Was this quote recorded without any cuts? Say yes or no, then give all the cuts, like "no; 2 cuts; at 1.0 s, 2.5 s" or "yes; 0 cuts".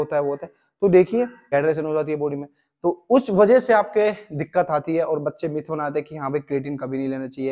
no; 1 cut; at 1.5 s